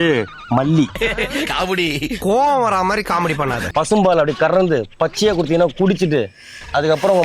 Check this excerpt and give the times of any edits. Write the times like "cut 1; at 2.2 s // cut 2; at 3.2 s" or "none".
cut 1; at 0.9 s // cut 2; at 3.6 s